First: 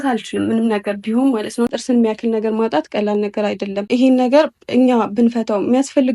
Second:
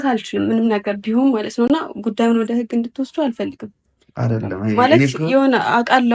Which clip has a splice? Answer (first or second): first